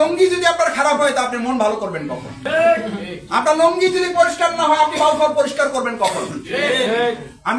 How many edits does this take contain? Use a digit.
1